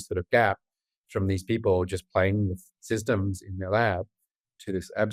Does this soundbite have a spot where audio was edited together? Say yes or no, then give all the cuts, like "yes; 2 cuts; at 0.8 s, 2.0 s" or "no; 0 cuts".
no; 0 cuts